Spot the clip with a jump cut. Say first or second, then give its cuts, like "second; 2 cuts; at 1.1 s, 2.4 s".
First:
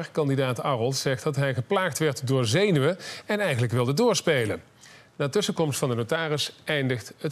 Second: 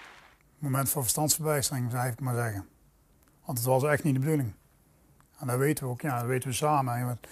first; 1 cut; at 3.6 s